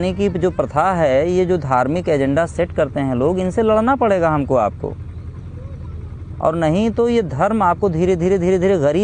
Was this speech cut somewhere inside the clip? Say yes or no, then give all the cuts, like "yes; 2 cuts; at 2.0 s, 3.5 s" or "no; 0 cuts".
no; 0 cuts